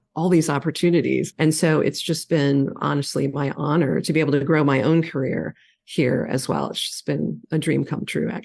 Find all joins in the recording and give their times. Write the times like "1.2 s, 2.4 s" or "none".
7.4 s